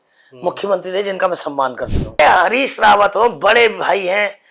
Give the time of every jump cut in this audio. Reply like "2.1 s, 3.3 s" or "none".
2.2 s

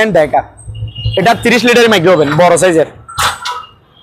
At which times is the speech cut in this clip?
none

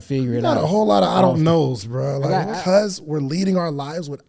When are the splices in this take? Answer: 2.5 s

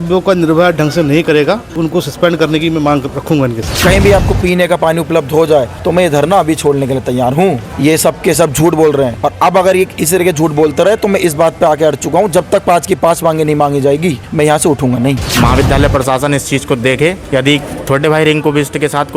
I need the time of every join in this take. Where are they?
1.8 s, 3.7 s, 5.8 s, 7.7 s, 9.2 s, 14.2 s, 15.3 s, 17.4 s

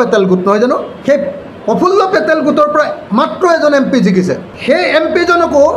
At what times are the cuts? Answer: 0.9 s, 4.5 s

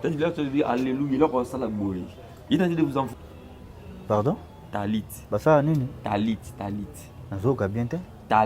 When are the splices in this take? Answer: 3.1 s

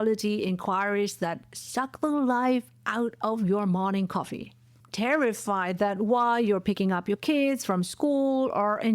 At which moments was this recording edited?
4.7 s

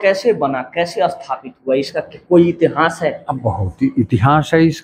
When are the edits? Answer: none

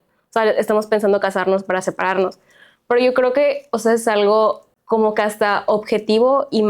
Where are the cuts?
4.7 s

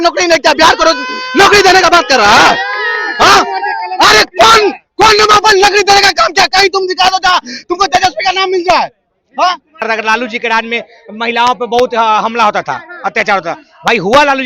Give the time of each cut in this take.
9.8 s

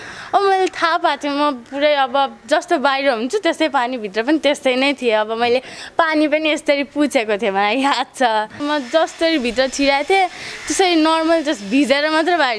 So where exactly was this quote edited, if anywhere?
8.6 s

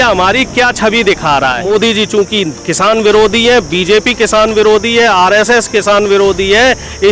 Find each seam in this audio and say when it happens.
1.6 s

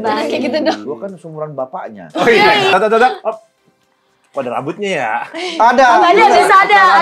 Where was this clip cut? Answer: 0.8 s, 2.7 s

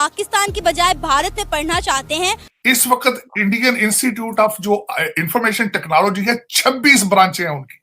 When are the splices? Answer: 2.5 s

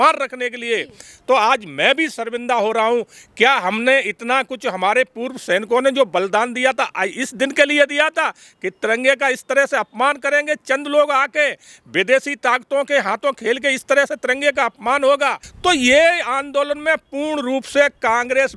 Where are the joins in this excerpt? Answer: 15.5 s

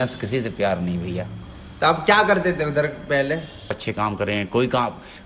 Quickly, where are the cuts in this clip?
3.8 s

